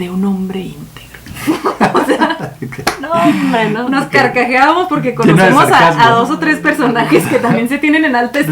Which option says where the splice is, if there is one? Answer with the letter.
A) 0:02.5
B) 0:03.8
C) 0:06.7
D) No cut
B